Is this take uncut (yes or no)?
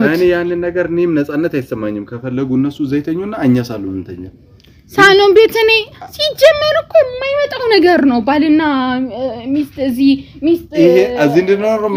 yes